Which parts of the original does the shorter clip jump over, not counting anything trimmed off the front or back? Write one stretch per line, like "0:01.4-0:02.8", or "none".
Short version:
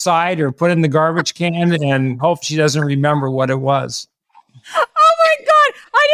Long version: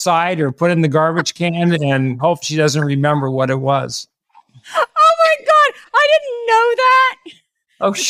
none